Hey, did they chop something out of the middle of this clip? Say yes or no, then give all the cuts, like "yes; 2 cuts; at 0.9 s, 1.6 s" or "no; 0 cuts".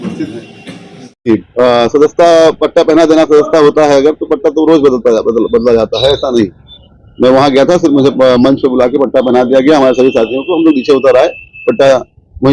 yes; 1 cut; at 1.3 s